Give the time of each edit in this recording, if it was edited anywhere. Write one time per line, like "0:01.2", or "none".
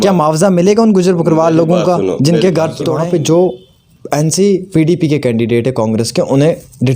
0:02.9